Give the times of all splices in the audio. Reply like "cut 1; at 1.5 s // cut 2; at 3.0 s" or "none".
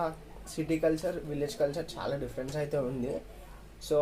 none